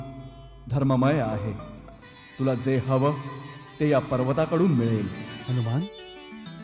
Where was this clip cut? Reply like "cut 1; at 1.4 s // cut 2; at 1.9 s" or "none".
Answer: cut 1; at 5.3 s